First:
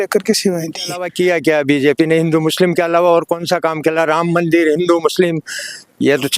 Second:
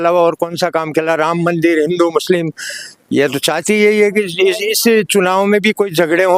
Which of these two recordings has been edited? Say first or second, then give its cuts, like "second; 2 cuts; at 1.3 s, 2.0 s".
first; 1 cut; at 1.1 s